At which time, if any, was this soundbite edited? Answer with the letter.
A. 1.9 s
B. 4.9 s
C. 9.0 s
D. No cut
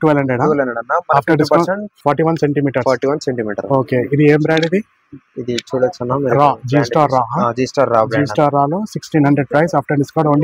A